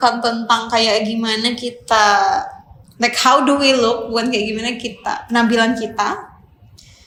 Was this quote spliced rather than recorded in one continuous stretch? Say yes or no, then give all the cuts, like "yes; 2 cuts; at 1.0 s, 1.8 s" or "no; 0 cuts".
no; 0 cuts